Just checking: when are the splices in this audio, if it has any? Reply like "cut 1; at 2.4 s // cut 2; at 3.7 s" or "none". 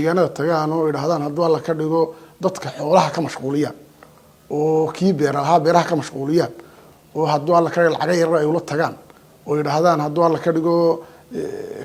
none